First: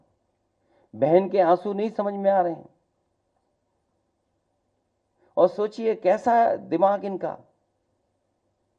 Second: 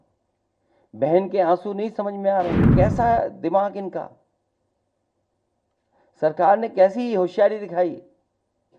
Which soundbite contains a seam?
second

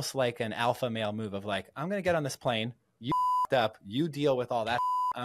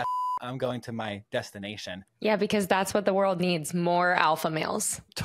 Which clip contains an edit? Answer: second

